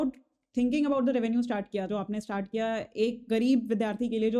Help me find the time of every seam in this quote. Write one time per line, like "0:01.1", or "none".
0:01.8